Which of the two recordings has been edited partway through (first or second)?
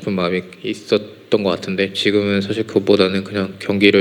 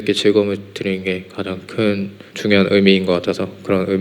second